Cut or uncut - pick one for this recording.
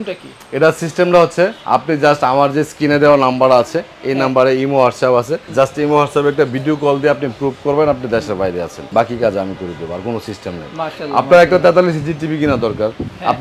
uncut